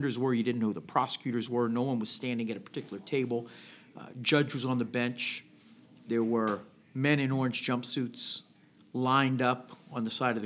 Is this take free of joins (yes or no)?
yes